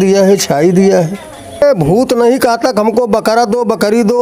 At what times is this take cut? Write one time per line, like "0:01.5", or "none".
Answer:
0:01.6